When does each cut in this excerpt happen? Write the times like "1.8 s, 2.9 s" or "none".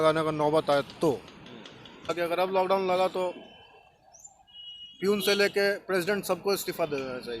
2.1 s